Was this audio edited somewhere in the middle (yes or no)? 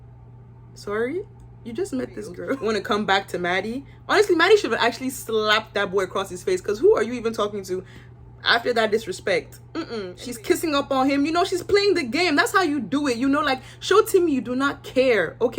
yes